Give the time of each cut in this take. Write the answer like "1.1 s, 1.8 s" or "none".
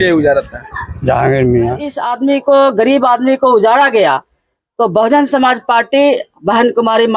2.0 s